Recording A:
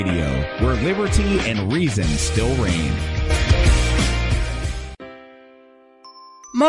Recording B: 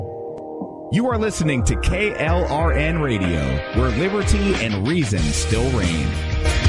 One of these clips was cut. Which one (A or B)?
A